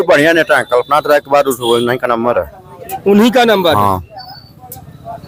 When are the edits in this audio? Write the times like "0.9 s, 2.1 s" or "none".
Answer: none